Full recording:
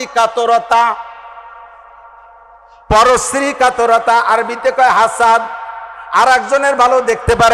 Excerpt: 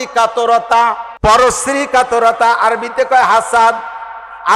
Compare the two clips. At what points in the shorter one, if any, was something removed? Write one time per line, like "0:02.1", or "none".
0:01.1